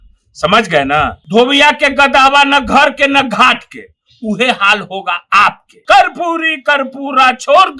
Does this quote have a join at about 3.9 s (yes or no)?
no